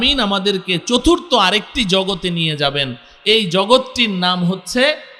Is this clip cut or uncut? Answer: uncut